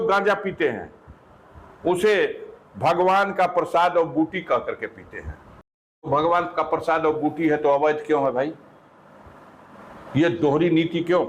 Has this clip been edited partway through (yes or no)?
yes